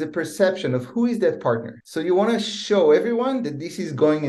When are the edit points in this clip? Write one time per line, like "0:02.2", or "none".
none